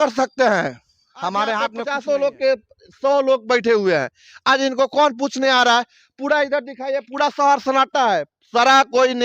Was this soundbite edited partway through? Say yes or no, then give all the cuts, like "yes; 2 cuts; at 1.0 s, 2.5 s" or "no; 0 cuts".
yes; 1 cut; at 1.8 s